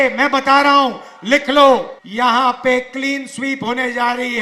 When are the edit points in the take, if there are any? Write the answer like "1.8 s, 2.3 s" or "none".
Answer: 2.0 s